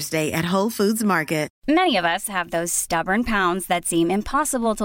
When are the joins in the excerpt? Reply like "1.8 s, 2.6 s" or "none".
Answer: 1.5 s